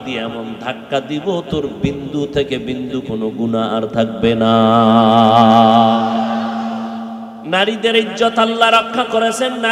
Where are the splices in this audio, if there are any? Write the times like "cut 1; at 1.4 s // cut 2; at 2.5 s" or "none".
cut 1; at 7.3 s